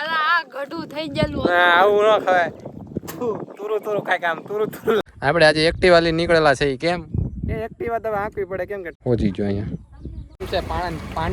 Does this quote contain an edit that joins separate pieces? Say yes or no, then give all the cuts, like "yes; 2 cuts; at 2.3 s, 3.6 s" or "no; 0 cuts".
yes; 3 cuts; at 5.0 s, 8.9 s, 10.4 s